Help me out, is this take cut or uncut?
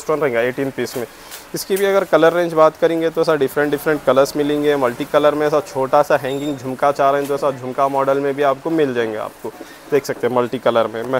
uncut